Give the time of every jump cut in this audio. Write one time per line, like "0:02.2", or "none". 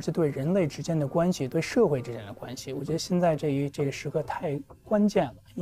none